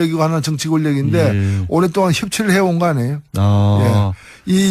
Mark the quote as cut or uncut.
cut